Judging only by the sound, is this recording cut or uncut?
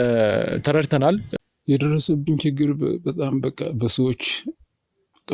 cut